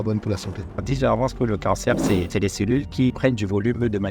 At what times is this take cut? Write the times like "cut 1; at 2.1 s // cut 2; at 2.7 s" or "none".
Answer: cut 1; at 0.8 s // cut 2; at 2.3 s // cut 3; at 3.1 s